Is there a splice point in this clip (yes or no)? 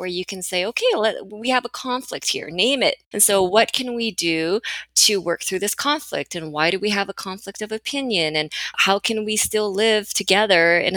yes